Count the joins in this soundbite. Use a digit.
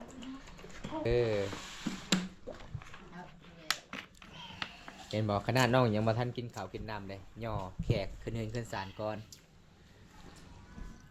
1